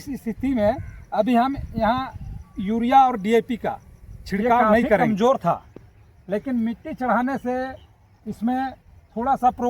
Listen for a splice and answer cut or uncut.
cut